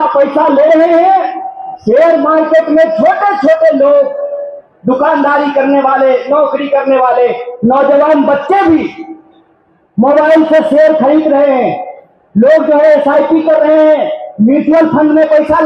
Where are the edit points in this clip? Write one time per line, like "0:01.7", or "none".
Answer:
none